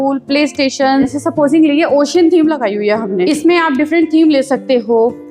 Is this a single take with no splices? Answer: no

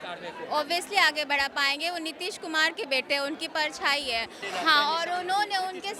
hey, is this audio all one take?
no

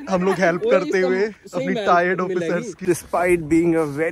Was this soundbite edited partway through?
yes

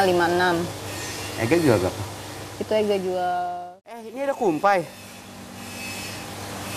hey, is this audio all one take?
no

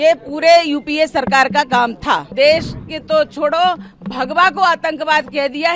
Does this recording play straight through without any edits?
no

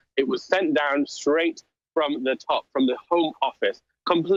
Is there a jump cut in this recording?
no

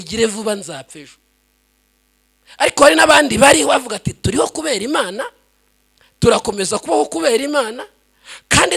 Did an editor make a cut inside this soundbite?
no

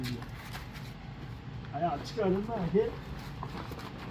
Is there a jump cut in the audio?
no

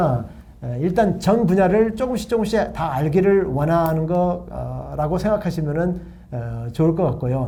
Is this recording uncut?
yes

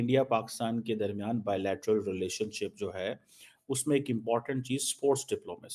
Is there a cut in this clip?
no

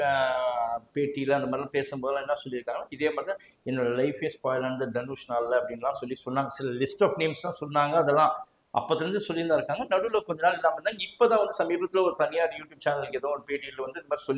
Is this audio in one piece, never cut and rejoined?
yes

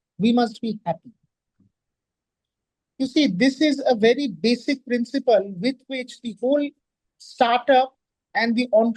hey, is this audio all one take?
yes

